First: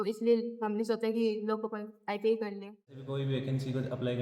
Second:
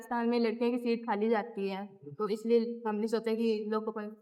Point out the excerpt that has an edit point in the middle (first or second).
first